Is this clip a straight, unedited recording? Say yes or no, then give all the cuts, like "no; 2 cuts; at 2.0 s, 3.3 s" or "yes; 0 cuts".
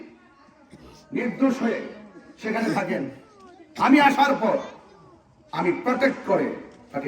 yes; 0 cuts